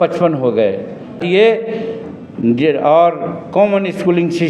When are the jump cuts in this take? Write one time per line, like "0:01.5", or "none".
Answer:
0:01.2